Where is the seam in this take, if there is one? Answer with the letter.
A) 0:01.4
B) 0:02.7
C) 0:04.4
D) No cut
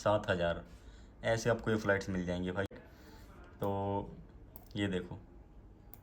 B